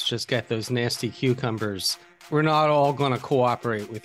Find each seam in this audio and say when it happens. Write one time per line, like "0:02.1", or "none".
0:02.2

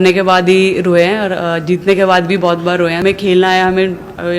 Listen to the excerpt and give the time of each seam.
0:03.0

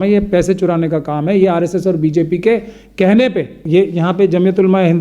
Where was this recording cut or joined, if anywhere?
0:03.5

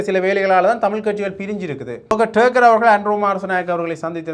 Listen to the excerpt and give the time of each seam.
0:02.1

